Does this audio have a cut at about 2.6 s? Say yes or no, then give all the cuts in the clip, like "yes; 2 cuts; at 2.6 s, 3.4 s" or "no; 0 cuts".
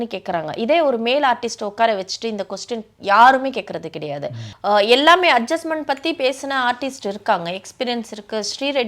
no; 1 cut; at 4.5 s